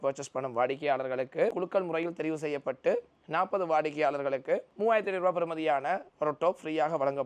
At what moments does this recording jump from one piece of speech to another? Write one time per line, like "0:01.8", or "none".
0:01.6
0:04.7